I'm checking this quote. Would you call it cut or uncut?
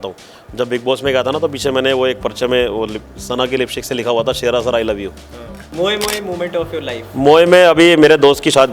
cut